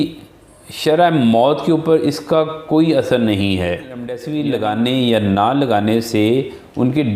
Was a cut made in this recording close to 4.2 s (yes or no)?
yes